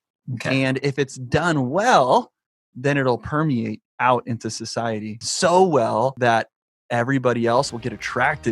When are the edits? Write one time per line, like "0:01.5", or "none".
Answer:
0:03.9
0:05.2
0:06.1
0:07.7